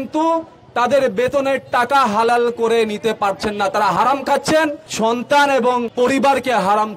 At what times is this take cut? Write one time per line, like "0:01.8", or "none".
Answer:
0:04.8
0:05.9